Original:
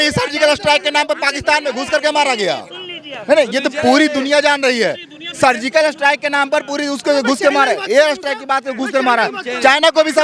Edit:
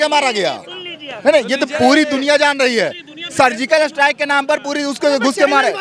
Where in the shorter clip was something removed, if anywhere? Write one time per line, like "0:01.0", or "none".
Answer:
none